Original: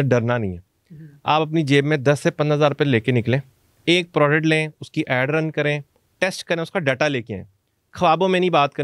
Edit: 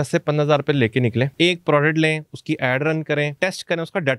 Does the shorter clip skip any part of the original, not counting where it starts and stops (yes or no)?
yes